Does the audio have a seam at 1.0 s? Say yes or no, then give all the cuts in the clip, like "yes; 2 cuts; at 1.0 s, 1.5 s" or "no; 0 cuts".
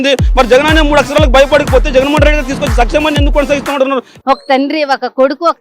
no; 1 cut; at 4.1 s